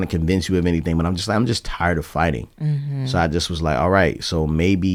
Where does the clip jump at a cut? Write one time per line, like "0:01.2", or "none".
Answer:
none